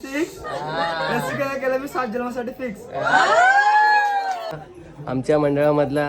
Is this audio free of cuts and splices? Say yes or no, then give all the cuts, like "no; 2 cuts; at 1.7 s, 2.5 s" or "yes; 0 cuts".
no; 1 cut; at 4.5 s